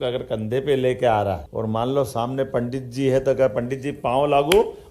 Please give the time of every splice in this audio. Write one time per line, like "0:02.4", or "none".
0:01.5